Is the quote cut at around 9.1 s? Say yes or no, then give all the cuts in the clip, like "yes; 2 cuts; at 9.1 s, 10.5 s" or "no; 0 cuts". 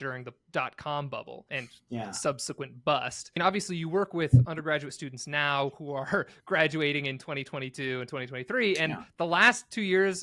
no; 2 cuts; at 1.5 s, 3.4 s